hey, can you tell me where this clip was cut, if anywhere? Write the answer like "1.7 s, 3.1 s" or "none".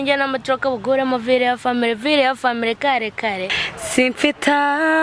3.6 s